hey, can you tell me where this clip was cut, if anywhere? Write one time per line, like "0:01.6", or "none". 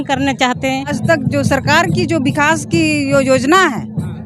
0:00.9